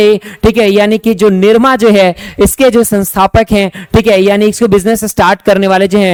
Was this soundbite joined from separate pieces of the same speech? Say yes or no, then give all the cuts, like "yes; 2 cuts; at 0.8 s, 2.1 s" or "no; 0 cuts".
no; 0 cuts